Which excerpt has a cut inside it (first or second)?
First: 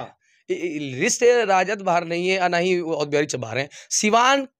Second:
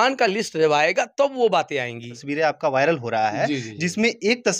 second